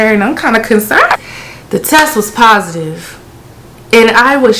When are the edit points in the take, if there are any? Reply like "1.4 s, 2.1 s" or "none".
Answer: 1.1 s